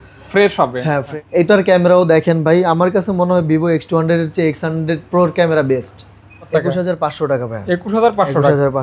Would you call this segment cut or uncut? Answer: cut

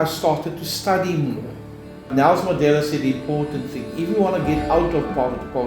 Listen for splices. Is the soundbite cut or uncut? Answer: cut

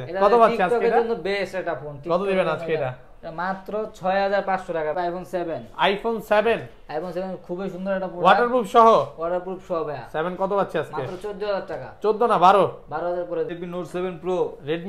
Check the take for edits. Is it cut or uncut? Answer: cut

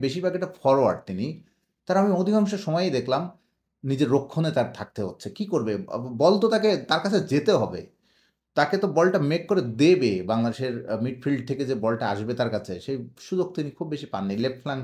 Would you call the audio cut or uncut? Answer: uncut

